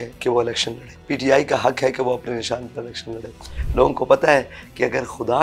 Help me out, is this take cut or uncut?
cut